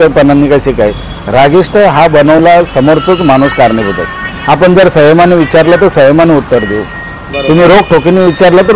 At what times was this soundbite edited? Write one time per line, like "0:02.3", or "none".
none